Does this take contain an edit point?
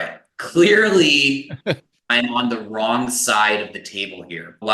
yes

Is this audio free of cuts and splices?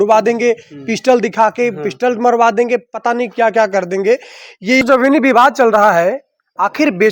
no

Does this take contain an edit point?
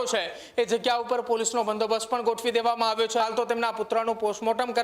yes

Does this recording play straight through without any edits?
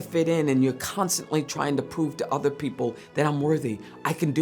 yes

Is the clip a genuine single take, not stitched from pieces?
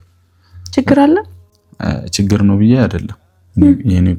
yes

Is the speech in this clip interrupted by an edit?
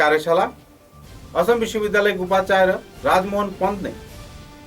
no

